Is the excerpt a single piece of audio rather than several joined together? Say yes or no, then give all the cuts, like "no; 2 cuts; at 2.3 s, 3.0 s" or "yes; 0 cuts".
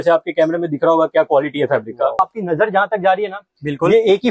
no; 1 cut; at 2.2 s